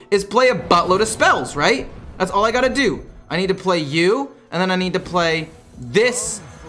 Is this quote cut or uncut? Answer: uncut